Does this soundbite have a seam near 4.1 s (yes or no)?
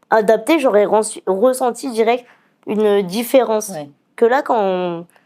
yes